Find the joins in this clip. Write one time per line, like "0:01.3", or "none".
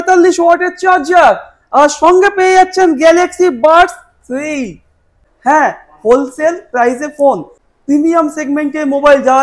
0:05.2
0:07.6

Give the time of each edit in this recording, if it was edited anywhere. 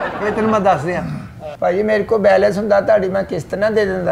0:01.5

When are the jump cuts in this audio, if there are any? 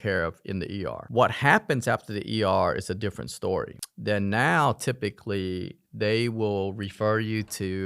none

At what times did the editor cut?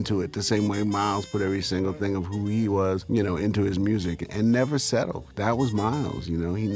0:03.0
0:04.2
0:05.2

